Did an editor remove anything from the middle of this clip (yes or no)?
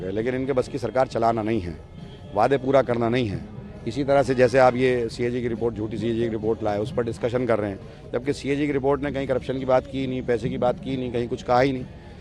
no